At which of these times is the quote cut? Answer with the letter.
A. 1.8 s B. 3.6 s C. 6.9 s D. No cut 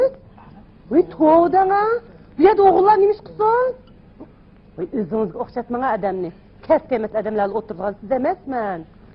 C